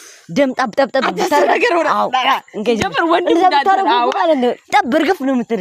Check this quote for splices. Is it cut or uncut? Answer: uncut